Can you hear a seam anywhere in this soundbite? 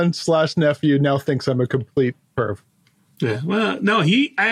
no; 0 cuts

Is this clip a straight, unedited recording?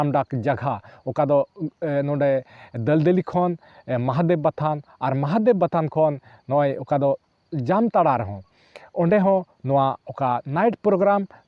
yes; 0 cuts

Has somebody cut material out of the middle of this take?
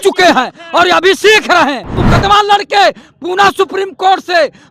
yes; 1 cut; at 2.0 s

